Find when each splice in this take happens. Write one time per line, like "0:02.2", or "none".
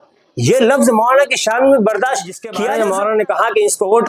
0:02.5

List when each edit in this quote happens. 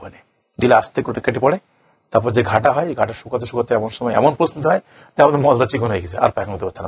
none

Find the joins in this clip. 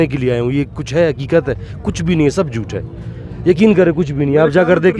none

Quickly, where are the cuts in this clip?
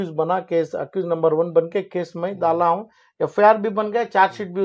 none

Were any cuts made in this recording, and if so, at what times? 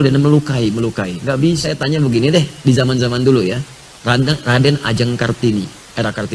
0:01.7

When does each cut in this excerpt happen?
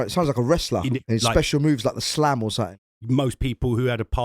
0:01.0
0:02.7

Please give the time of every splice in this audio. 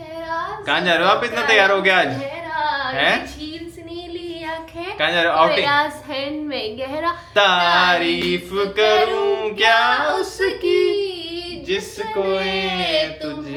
none

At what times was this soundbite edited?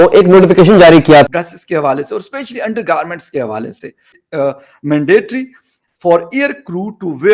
0:01.3
0:04.1

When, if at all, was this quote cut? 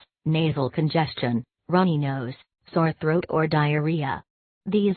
none

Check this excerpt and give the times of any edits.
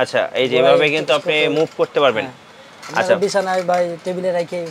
none

